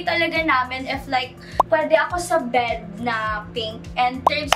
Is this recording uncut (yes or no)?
yes